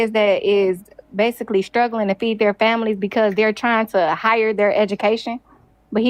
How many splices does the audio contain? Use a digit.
0